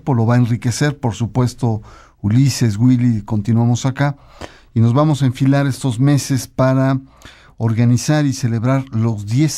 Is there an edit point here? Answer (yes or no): yes